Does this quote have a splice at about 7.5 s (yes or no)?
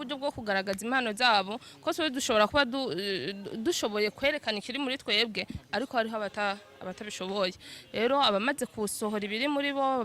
no